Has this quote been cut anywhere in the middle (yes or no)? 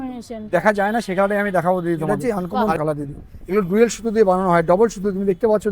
yes